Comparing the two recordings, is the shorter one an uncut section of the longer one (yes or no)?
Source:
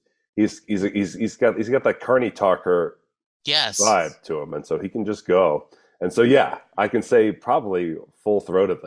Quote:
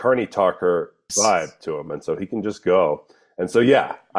no